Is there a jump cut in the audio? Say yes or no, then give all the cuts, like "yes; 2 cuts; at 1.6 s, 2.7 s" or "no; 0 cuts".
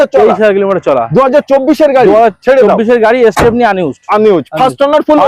no; 0 cuts